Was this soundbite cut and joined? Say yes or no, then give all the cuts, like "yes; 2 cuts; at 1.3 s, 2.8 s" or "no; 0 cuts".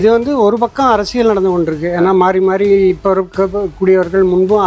no; 0 cuts